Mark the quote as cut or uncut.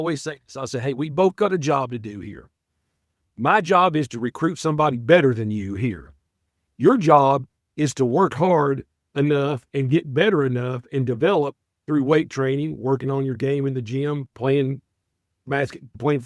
uncut